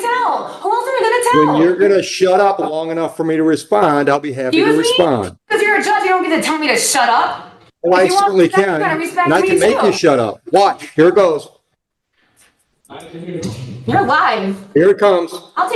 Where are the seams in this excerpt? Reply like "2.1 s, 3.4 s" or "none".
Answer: none